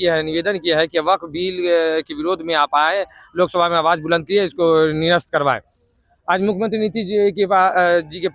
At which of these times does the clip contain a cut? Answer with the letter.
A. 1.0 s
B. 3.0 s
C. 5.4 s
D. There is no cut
D